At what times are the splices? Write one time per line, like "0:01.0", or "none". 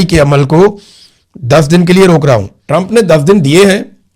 0:02.5